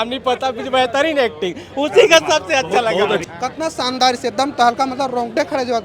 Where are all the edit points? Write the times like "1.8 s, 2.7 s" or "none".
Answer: 3.3 s